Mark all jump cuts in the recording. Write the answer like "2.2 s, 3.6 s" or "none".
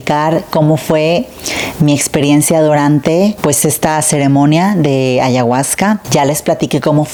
none